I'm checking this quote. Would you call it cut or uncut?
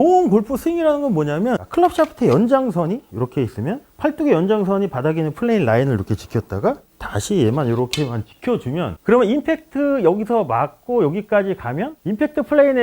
cut